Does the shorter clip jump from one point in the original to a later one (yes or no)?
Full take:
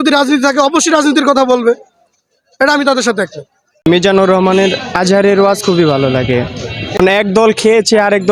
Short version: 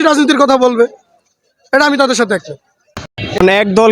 yes